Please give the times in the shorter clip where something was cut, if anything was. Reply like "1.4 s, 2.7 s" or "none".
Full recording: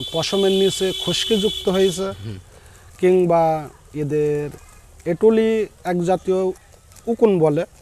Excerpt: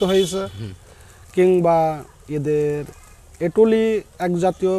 none